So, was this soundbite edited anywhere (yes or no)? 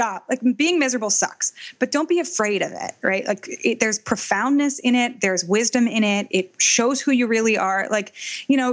no